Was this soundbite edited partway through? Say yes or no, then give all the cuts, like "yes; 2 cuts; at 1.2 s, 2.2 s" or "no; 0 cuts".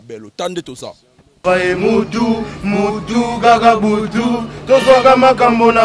yes; 1 cut; at 1.4 s